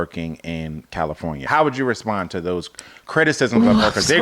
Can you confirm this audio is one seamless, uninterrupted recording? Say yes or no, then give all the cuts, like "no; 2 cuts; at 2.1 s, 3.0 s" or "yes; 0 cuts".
no; 1 cut; at 1.4 s